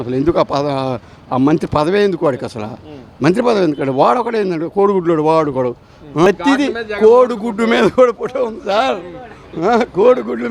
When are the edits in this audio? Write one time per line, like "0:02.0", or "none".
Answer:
0:06.3